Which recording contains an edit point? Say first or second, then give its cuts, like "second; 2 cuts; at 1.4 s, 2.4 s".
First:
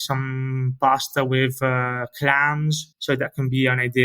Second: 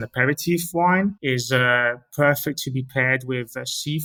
first; 1 cut; at 2.8 s